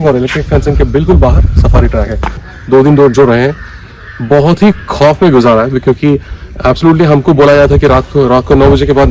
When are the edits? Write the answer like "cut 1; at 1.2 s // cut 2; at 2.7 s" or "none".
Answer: cut 1; at 2.5 s

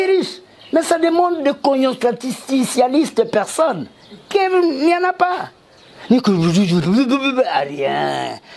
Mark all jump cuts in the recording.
none

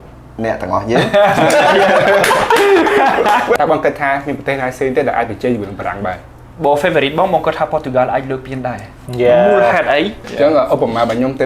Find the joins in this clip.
cut 1; at 3.6 s // cut 2; at 10.3 s

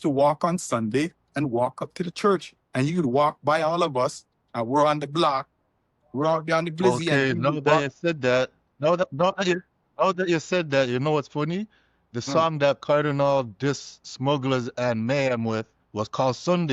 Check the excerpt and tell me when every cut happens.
none

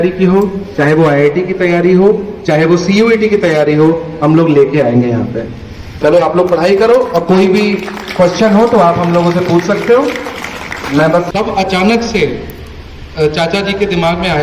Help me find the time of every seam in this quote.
cut 1; at 11.3 s

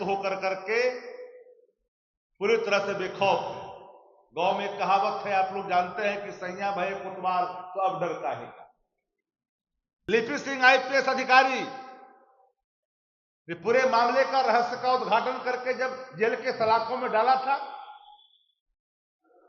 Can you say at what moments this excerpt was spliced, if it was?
cut 1; at 10.1 s

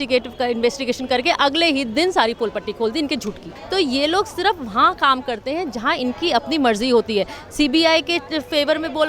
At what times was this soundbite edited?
cut 1; at 3.5 s

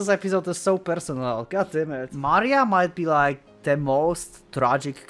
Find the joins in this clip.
cut 1; at 2.1 s

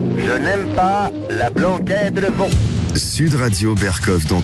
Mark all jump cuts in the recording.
none

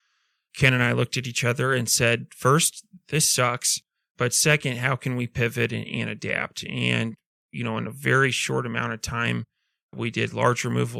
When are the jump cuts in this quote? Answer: none

